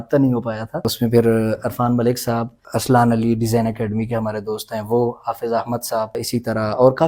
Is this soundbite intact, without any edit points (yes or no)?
no